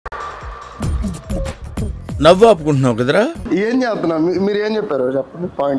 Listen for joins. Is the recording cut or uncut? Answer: uncut